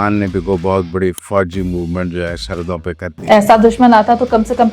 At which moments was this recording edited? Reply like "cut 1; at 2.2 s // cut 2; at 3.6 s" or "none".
cut 1; at 1.2 s